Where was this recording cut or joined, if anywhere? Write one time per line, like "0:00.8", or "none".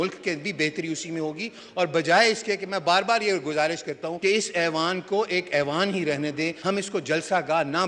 0:04.1
0:06.6

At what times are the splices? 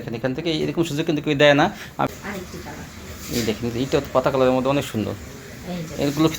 0:02.1

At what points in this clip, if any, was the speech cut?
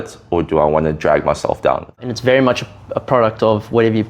0:02.1

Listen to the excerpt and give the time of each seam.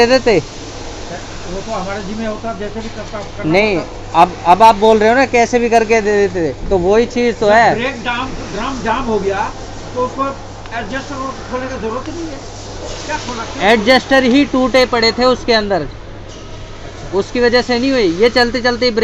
none

